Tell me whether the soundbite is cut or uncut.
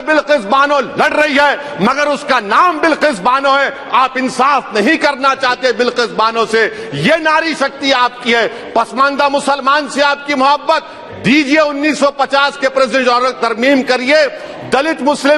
uncut